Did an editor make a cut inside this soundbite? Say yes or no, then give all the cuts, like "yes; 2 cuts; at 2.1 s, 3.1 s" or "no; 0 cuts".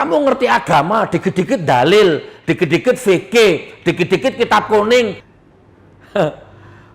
yes; 1 cut; at 5.1 s